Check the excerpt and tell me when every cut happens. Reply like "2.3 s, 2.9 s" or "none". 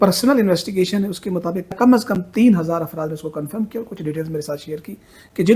1.7 s